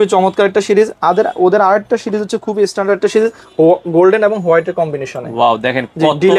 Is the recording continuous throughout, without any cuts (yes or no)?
yes